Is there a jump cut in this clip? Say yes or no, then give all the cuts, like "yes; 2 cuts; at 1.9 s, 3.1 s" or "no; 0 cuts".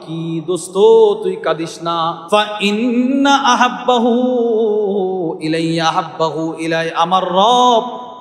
yes; 1 cut; at 2.2 s